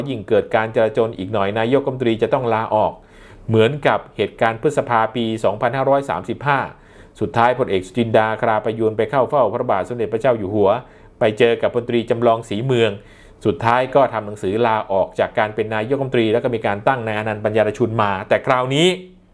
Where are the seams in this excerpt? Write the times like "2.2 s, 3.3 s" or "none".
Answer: none